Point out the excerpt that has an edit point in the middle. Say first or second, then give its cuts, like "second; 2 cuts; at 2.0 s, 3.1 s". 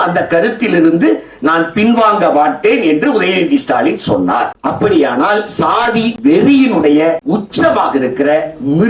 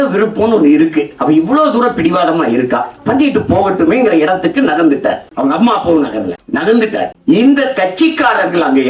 first; 3 cuts; at 4.6 s, 6.2 s, 7.2 s